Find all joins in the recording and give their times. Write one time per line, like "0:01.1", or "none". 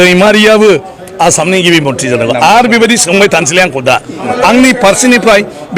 0:04.3